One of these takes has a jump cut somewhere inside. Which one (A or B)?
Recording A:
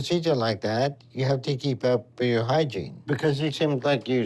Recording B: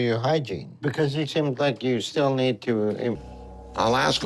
B